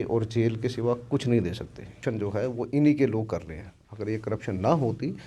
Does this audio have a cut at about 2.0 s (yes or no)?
yes